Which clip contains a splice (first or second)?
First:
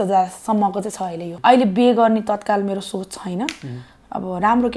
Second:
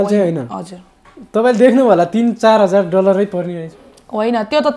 first